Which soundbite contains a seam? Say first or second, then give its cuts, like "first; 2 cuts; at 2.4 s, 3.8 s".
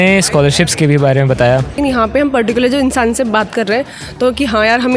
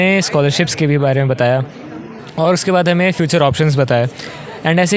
first; 1 cut; at 1.8 s